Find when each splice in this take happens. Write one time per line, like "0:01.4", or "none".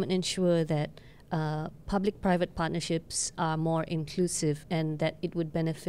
none